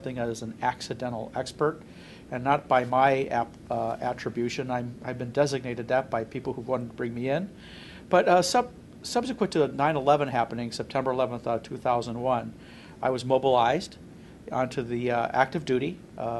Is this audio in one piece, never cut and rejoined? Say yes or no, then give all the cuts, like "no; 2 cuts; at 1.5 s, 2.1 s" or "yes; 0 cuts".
no; 1 cut; at 1.1 s